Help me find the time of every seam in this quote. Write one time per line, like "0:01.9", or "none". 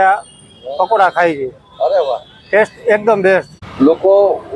0:03.6